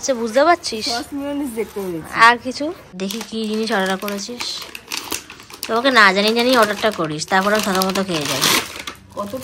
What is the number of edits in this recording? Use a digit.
1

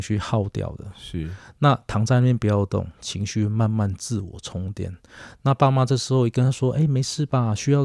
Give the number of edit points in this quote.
0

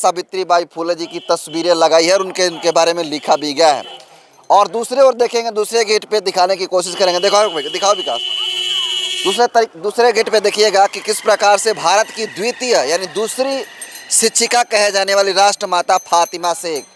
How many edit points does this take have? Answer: 0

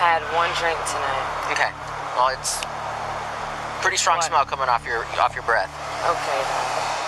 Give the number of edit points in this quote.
0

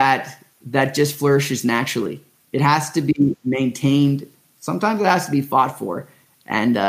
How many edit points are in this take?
1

